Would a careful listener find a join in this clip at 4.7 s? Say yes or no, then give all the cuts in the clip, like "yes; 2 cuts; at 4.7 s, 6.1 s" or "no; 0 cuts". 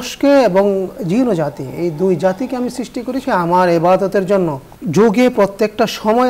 yes; 2 cuts; at 3.2 s, 4.7 s